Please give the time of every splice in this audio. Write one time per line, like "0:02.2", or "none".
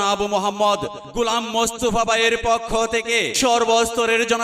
none